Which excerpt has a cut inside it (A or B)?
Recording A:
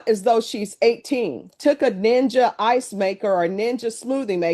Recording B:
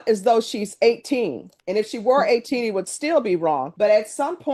A